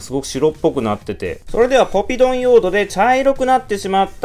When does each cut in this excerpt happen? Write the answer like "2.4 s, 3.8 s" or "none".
1.3 s